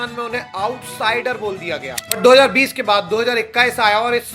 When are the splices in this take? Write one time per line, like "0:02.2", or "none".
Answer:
0:02.0